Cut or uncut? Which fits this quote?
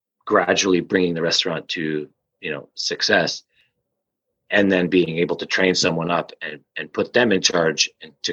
uncut